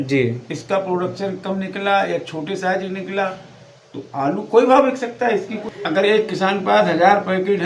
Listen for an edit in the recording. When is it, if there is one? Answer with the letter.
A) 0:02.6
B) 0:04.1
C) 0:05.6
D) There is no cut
C